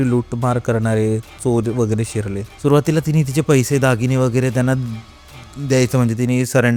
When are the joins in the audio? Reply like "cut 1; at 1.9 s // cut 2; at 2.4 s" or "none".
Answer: none